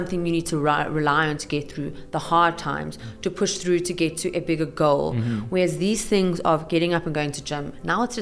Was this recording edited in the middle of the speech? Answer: no; 0 cuts

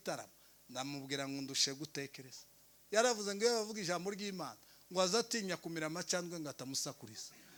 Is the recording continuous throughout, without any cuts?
yes; 0 cuts

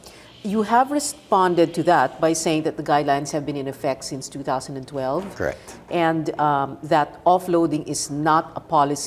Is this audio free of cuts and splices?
yes; 0 cuts

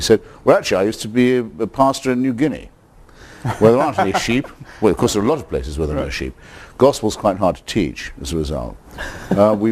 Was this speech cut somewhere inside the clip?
yes; 1 cut; at 8.0 s

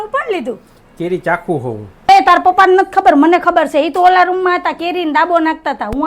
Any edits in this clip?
yes; 1 cut; at 2.1 s

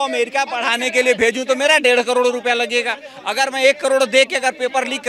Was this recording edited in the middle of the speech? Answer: no; 0 cuts

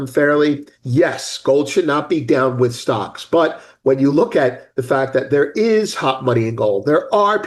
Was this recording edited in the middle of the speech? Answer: no; 0 cuts

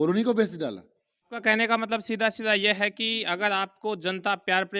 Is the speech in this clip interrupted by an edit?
yes; 1 cut; at 1.3 s

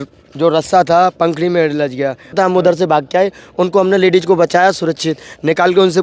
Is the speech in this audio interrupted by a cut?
yes; 1 cut; at 2.4 s

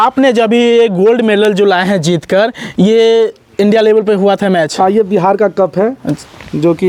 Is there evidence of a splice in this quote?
no; 0 cuts

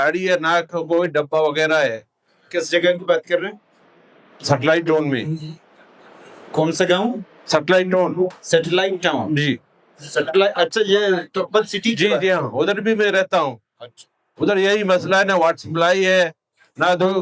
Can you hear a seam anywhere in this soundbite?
no; 0 cuts

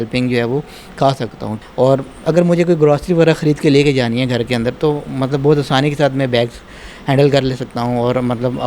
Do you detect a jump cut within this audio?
yes; 1 cut; at 1.6 s

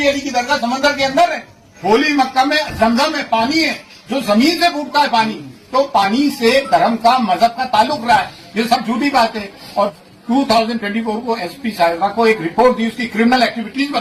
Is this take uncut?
no; 2 cuts; at 1.6 s, 9.9 s

